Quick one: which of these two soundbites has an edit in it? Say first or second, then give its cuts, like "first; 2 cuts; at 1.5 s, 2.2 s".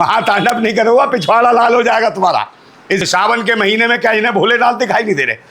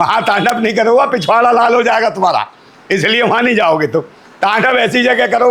first; 1 cut; at 3.0 s